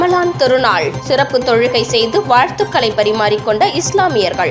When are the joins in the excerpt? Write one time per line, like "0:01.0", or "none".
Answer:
none